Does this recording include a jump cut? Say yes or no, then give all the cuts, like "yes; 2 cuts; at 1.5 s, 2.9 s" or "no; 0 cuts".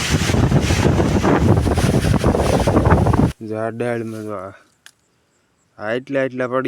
yes; 1 cut; at 3.3 s